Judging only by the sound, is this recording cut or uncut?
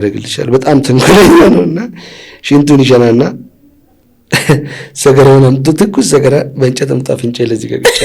uncut